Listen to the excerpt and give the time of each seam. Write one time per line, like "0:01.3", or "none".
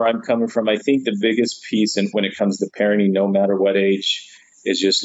none